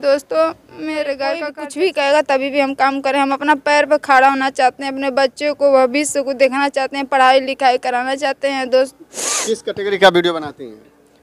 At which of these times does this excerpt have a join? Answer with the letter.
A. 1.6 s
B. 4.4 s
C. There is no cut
A